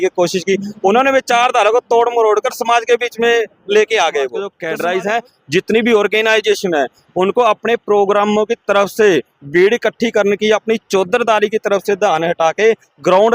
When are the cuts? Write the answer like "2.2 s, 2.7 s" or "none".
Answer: 4.5 s